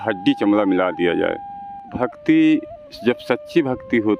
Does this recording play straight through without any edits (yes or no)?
no